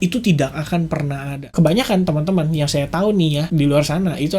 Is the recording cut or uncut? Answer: cut